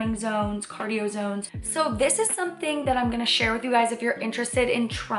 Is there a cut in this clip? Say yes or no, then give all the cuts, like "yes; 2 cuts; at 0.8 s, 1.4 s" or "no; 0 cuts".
yes; 1 cut; at 1.4 s